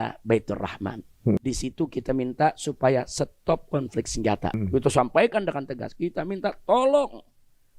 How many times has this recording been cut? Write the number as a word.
two